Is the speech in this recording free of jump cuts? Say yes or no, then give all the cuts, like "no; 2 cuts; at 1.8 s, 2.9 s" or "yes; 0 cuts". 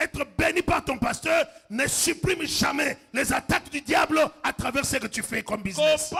yes; 0 cuts